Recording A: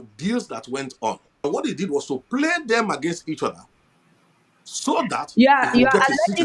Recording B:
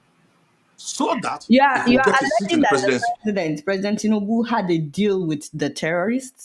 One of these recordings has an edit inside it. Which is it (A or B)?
A